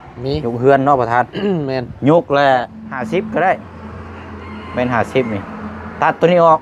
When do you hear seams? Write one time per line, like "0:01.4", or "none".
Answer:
0:02.8